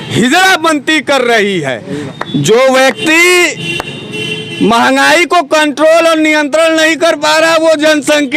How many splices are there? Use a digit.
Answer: 1